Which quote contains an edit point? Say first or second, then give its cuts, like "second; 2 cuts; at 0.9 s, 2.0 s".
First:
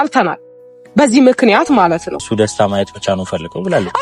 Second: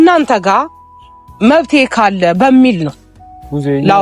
first; 1 cut; at 2.2 s